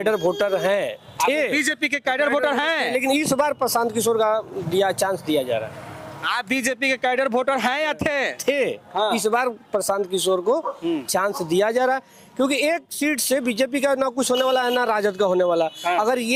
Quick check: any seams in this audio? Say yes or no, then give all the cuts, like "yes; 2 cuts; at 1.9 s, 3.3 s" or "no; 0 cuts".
no; 0 cuts